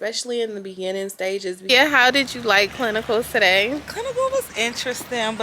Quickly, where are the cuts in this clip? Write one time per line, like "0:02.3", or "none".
0:01.7